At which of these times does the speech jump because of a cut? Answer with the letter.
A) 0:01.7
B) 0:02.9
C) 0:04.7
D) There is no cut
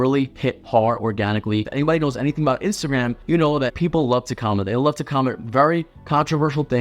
A